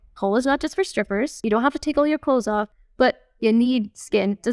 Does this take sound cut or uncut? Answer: cut